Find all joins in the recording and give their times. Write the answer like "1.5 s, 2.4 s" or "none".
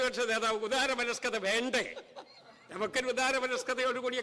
none